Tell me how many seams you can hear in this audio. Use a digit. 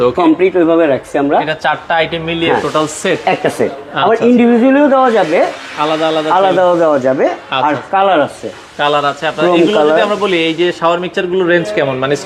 0